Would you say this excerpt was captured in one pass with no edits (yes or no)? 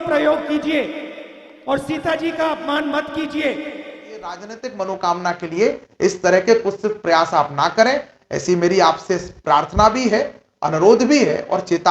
no